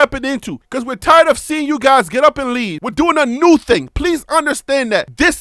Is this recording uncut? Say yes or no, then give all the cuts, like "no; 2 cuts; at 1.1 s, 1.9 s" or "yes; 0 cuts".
no; 1 cut; at 2.7 s